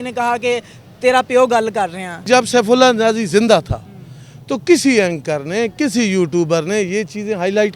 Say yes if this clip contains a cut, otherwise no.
yes